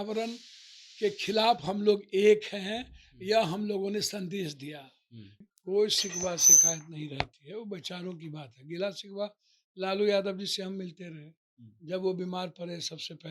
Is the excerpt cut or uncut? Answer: cut